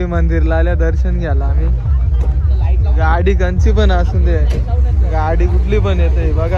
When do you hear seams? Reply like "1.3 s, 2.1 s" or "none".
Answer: none

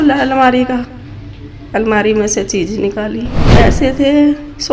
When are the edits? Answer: 3.5 s

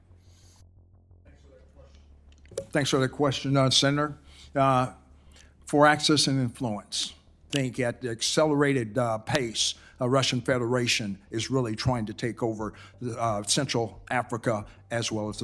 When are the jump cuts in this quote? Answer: 7.5 s

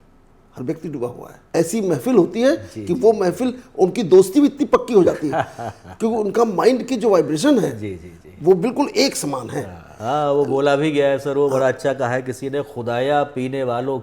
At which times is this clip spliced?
1.3 s, 9.9 s

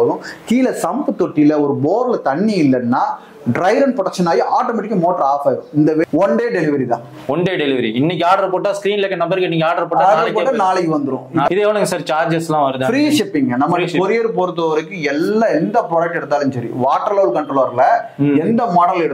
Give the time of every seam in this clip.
6.0 s, 11.5 s

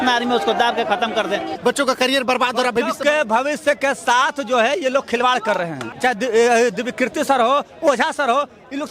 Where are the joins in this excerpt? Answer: 1.5 s, 5.8 s

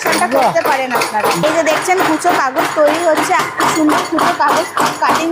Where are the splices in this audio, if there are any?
1.4 s, 3.4 s

